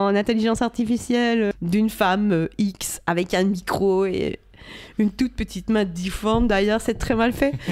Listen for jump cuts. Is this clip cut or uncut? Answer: cut